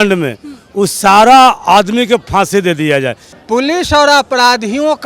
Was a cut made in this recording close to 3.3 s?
yes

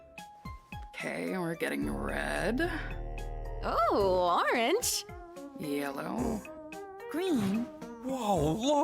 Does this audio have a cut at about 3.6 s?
no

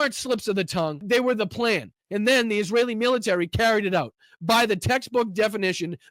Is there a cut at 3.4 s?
no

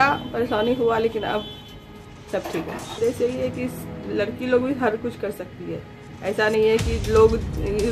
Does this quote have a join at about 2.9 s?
yes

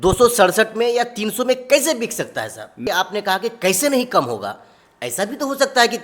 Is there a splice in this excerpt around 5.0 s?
no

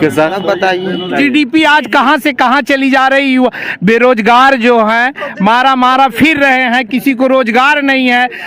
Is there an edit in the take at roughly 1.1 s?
yes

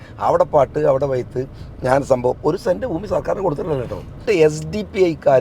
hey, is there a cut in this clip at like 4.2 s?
yes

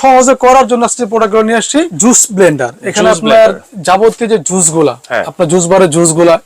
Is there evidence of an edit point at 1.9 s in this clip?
yes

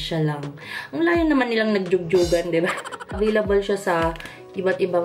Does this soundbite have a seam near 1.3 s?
no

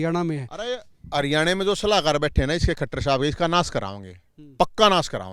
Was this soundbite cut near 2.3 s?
no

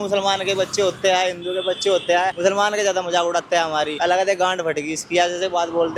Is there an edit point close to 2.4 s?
yes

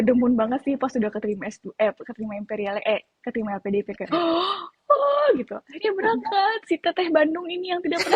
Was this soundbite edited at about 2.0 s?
no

